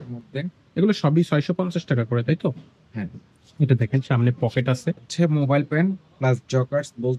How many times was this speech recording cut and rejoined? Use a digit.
1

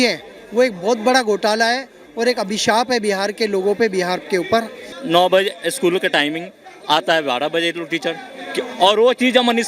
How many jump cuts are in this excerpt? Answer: 1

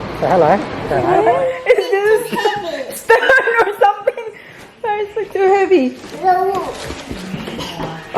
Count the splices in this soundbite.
1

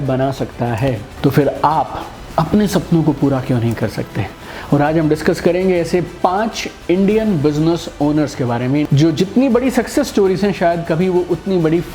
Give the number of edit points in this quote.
2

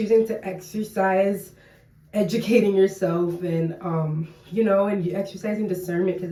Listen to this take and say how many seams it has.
0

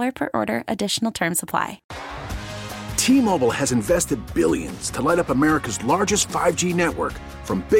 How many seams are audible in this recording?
1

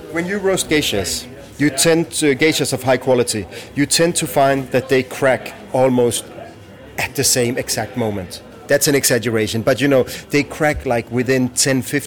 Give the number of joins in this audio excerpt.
0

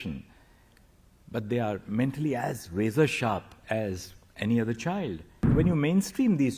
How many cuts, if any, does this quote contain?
1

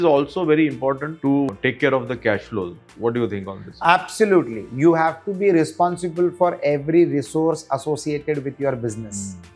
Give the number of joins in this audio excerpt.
2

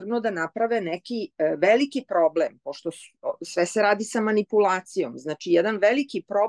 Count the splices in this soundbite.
0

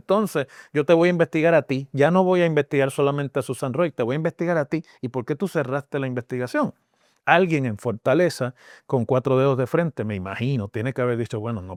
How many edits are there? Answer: 0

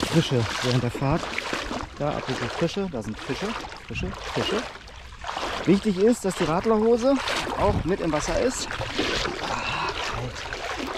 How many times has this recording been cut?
0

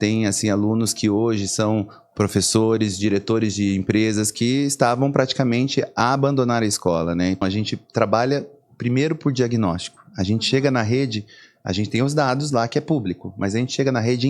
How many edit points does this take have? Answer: 1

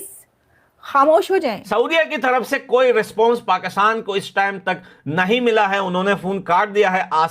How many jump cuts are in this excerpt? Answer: 1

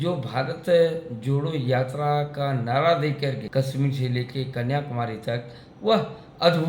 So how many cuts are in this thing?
1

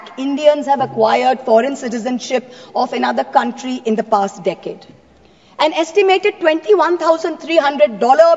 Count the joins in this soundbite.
0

